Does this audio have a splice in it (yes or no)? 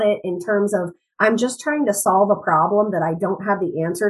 no